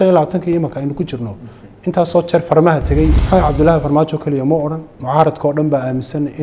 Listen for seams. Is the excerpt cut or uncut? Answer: cut